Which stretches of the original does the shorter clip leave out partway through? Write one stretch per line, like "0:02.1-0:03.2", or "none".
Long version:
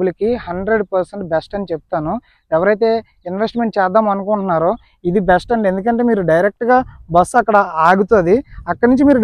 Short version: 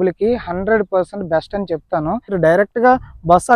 0:02.3-0:06.2